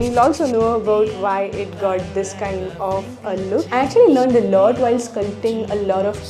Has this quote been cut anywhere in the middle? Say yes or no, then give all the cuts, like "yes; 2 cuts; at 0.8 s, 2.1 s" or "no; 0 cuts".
yes; 1 cut; at 3.7 s